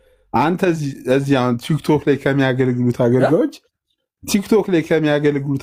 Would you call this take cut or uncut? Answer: uncut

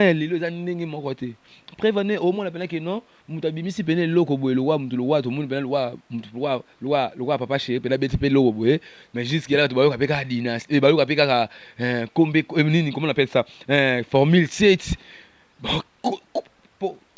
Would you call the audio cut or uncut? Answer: uncut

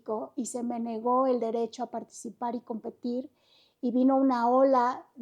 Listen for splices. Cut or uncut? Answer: uncut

